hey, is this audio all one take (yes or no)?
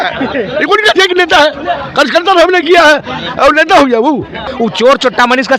no